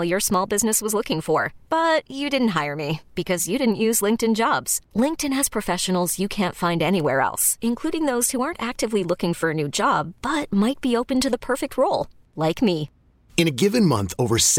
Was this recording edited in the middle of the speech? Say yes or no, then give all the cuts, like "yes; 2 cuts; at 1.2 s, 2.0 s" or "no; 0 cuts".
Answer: no; 0 cuts